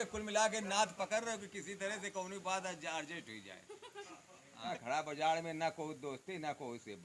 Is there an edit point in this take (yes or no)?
yes